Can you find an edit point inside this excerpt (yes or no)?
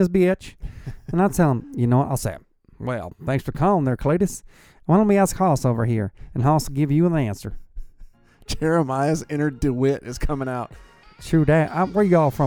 no